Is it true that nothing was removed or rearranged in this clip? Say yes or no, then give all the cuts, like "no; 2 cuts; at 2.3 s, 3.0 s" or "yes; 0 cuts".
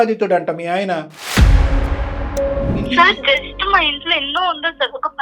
no; 1 cut; at 2.8 s